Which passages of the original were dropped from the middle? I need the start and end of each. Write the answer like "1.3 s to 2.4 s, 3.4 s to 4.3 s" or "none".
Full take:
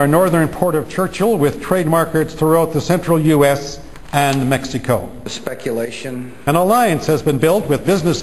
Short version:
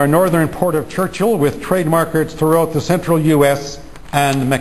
none